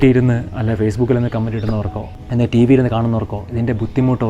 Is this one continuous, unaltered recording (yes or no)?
no